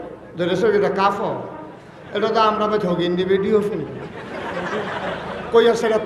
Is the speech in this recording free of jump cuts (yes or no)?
yes